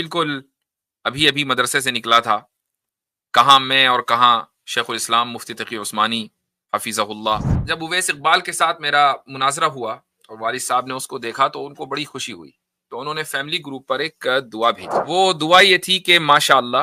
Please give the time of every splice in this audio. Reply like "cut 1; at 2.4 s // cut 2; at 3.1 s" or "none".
cut 1; at 7.6 s // cut 2; at 15.0 s